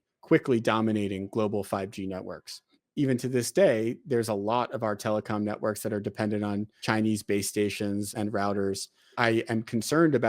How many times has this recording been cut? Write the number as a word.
four